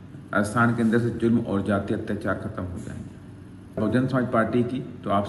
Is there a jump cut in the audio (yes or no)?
yes